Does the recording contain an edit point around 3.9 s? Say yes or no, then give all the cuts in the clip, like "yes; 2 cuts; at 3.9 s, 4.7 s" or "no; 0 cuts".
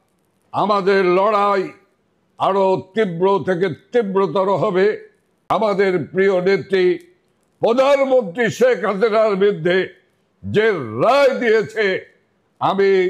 no; 1 cut; at 5.4 s